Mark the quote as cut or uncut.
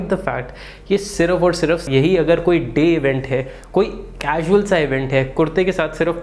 cut